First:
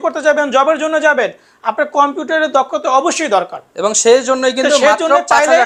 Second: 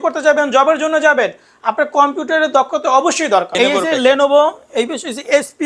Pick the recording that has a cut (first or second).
second